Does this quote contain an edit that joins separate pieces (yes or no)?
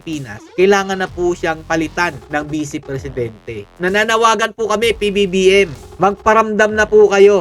yes